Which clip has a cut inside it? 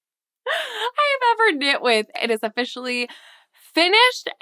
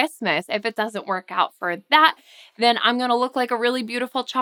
first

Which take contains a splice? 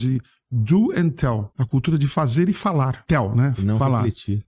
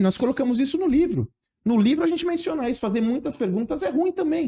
first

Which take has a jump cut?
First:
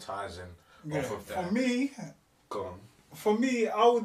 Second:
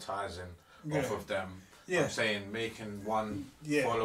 first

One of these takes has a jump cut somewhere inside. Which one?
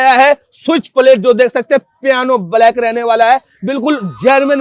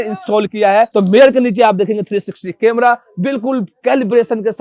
second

